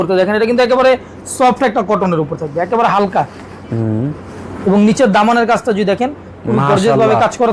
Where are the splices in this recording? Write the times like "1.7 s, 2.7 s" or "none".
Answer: none